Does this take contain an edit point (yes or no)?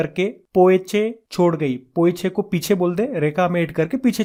no